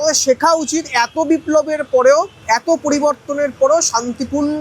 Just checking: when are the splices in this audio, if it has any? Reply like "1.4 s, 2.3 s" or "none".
2.4 s